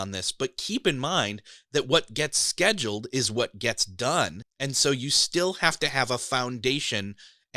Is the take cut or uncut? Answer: cut